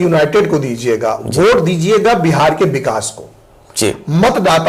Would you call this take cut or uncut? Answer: uncut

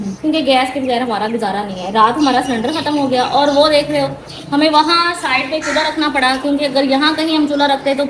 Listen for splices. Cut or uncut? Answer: uncut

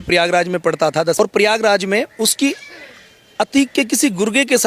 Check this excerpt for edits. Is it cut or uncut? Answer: cut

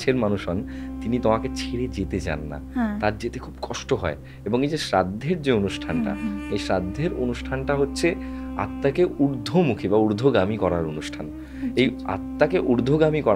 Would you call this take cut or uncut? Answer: uncut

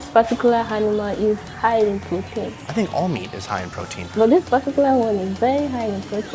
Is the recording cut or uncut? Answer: cut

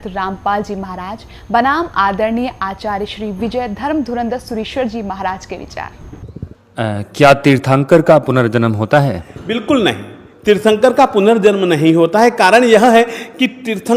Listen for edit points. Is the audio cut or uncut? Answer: cut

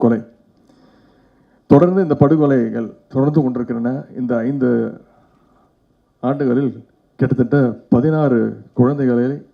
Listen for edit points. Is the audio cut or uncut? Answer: uncut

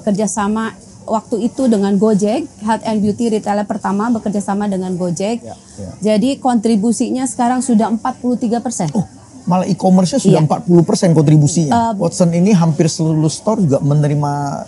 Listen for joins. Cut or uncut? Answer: cut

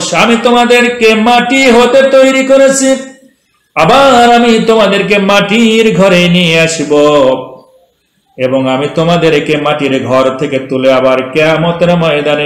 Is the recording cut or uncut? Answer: uncut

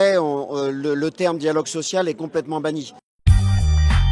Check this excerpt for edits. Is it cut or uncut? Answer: uncut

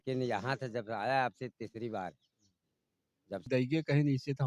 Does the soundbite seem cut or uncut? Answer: cut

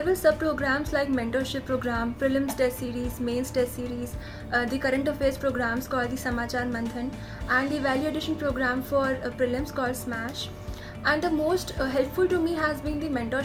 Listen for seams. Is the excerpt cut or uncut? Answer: uncut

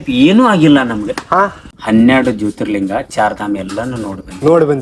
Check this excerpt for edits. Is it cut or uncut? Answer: cut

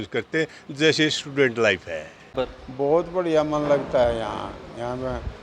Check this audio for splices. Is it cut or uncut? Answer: cut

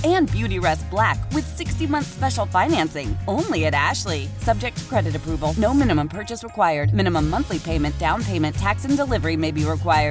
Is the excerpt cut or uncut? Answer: uncut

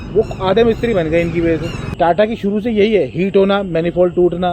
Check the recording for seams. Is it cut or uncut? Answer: cut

